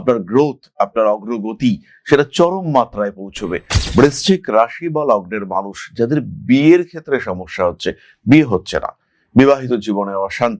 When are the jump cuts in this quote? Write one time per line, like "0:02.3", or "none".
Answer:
0:03.8